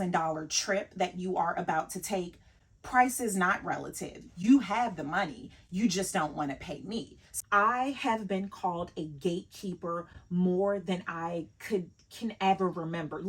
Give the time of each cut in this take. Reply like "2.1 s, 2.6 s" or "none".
7.2 s

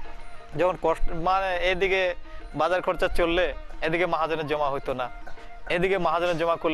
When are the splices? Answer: none

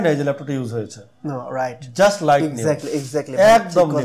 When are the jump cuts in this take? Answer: none

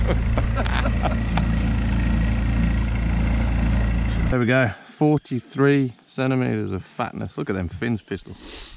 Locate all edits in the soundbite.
4.3 s

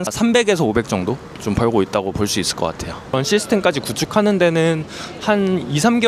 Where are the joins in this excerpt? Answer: 3.1 s

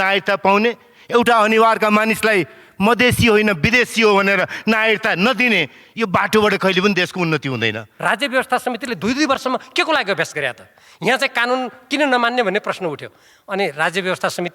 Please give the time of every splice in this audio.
7.9 s

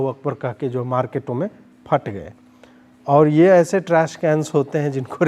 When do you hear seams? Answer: none

